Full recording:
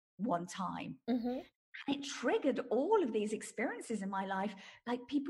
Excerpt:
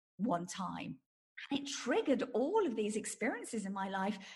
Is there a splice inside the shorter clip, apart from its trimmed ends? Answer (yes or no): yes